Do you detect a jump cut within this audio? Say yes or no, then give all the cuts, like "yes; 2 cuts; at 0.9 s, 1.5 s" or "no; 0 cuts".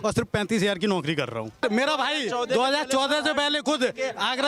yes; 1 cut; at 1.6 s